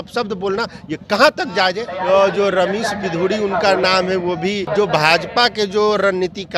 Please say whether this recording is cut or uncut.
cut